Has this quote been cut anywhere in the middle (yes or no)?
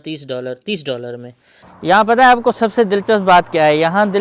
yes